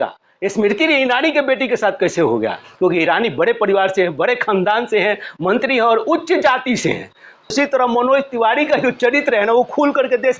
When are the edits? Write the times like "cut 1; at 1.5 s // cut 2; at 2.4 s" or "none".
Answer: cut 1; at 7.5 s